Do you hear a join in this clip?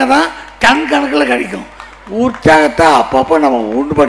no; 0 cuts

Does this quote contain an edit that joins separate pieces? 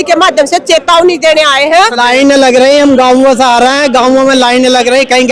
yes; 1 cut; at 2.0 s

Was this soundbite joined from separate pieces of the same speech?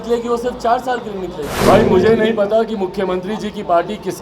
yes; 1 cut; at 1.6 s

